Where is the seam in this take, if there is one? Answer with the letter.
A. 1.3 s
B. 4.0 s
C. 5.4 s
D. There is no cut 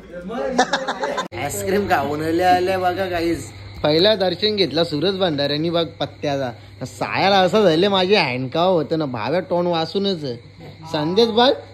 A